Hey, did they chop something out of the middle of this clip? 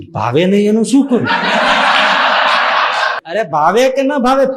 yes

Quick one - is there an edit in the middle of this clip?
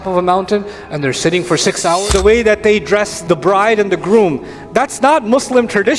yes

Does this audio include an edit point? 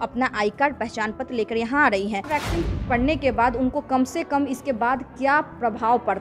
yes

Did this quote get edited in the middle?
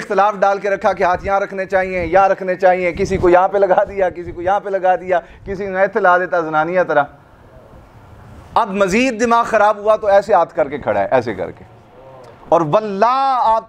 no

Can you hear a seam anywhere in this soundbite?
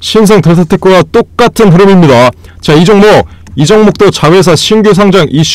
no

